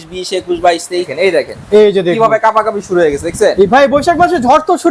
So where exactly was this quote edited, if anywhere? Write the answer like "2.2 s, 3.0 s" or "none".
1.1 s